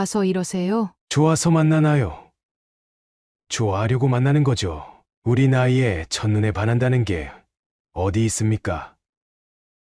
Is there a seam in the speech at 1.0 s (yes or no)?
yes